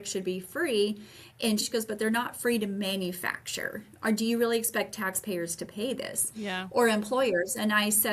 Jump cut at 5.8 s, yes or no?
no